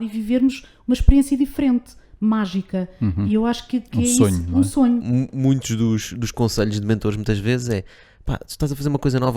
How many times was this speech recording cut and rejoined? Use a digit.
1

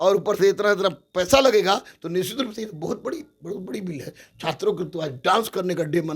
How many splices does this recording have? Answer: 0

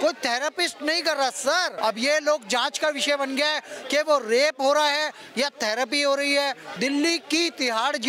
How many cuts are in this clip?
2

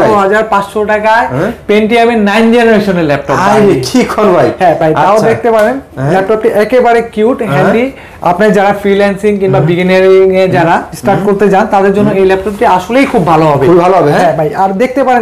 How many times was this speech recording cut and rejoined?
0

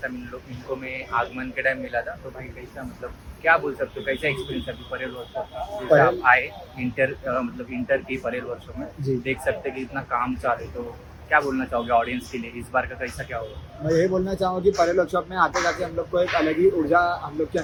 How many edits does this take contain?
0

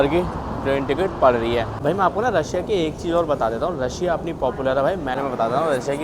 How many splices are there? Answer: 2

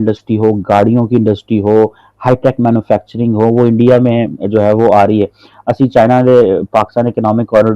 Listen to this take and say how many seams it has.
0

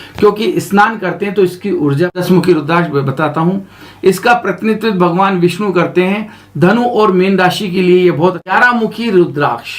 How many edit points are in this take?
2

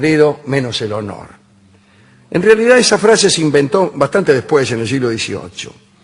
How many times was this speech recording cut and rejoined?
1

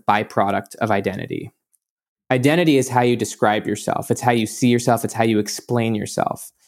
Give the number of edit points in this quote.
1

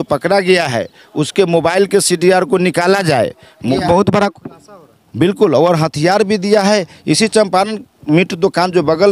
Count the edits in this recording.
1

